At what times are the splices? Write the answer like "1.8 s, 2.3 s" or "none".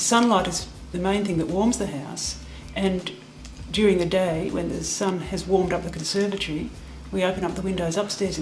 none